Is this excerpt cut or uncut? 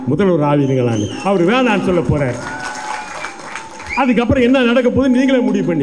uncut